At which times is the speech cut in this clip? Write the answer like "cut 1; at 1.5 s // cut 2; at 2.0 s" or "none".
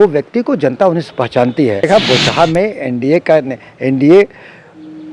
cut 1; at 1.9 s